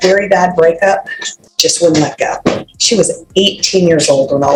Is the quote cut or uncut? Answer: uncut